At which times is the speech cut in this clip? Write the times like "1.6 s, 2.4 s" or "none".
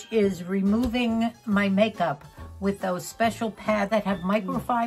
3.9 s